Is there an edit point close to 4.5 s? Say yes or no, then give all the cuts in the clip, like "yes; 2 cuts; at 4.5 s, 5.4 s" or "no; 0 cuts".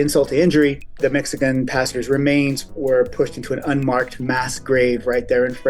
no; 2 cuts; at 1.0 s, 2.7 s